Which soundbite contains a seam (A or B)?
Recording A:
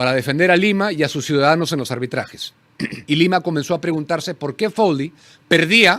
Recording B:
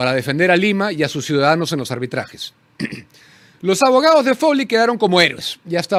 A